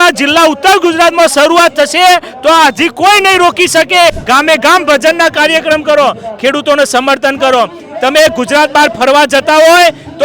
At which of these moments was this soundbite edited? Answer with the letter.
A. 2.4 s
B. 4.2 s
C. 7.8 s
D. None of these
B